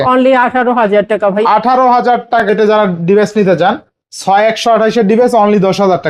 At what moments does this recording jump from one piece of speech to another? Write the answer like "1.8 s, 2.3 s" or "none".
2.5 s